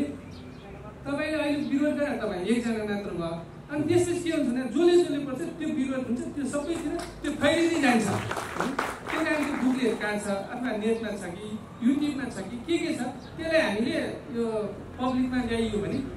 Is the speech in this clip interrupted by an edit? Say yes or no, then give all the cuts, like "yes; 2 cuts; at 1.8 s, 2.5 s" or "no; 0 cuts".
no; 0 cuts